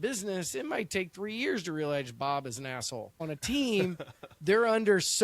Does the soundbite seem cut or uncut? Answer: cut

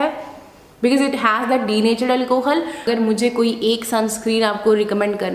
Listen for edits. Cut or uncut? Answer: cut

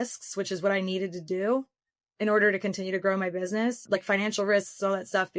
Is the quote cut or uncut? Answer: cut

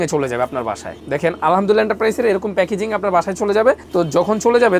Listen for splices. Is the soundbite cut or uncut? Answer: uncut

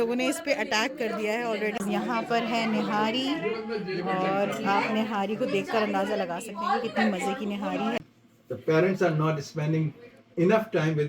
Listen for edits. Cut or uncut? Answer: cut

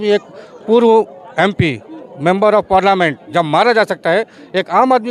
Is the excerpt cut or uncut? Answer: uncut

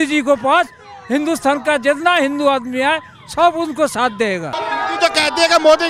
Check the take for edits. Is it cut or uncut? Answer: cut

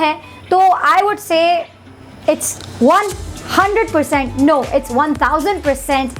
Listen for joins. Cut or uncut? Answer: uncut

